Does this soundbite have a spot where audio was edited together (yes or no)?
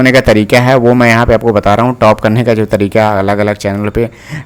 no